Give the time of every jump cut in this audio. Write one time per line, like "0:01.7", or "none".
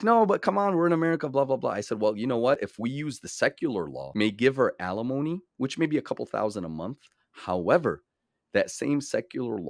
0:04.0